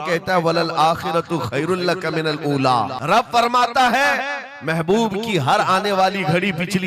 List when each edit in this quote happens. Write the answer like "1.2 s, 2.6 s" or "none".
3.0 s